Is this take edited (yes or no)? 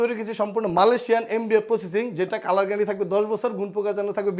no